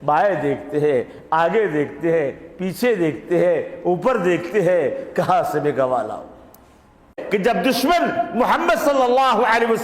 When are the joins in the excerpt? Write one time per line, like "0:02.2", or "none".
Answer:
0:07.2